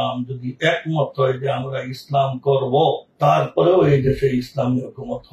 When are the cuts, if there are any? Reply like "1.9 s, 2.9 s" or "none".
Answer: none